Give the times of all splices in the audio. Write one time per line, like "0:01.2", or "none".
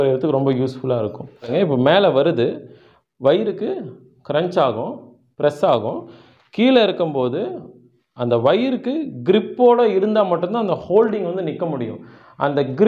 0:01.5